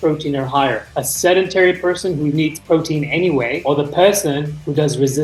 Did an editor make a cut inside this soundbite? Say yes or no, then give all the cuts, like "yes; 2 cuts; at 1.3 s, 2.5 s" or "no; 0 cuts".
no; 0 cuts